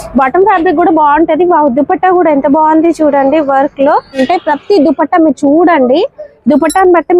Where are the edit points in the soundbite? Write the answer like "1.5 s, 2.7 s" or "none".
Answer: 4.2 s